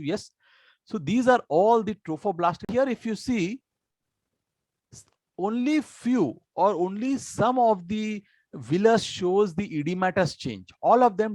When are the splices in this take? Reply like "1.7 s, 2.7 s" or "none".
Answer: 2.7 s